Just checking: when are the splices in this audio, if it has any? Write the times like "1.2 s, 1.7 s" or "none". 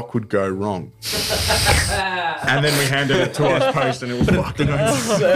none